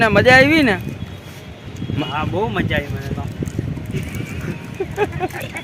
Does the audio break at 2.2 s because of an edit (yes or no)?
no